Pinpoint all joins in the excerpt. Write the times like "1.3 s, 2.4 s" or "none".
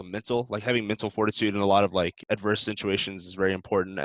2.2 s

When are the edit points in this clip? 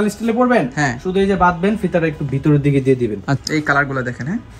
3.4 s

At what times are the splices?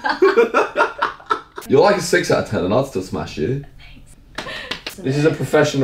1.6 s, 4.9 s

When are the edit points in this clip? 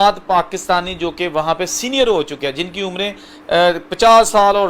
none

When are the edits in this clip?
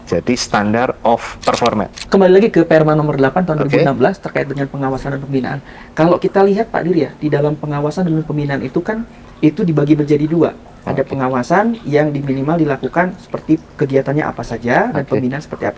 2.1 s

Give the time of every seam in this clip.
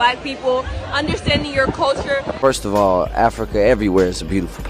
2.3 s

